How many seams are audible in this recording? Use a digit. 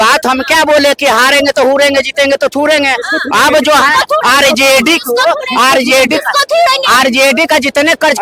0